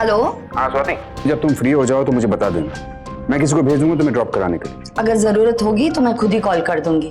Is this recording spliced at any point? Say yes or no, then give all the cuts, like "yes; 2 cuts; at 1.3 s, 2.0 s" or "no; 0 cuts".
yes; 2 cuts; at 1.2 s, 4.7 s